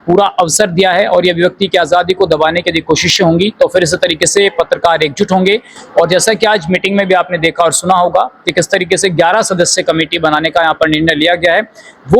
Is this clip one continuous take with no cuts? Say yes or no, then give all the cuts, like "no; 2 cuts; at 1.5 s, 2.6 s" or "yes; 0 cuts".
yes; 0 cuts